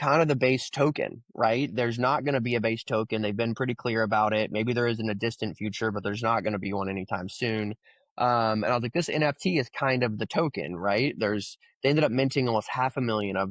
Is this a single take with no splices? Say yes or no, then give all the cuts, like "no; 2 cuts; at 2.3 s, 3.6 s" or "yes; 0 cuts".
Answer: yes; 0 cuts